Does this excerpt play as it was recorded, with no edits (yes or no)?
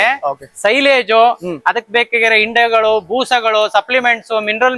yes